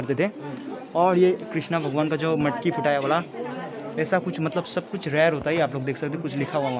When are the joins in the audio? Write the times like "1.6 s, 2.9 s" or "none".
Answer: none